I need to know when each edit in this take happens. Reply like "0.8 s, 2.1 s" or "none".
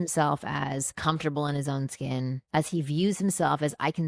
0.9 s, 2.4 s